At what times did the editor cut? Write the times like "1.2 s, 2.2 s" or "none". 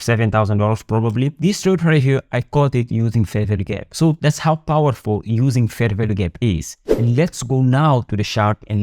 4.2 s, 6.8 s